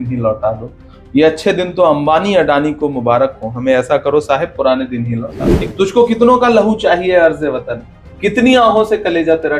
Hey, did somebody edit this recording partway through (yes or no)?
yes